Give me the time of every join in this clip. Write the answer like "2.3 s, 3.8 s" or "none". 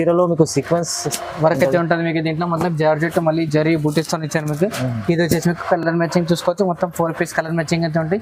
none